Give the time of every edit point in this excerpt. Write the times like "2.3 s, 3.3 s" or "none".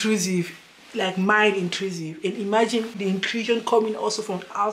3.0 s